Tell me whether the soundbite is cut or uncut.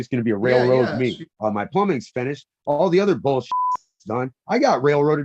cut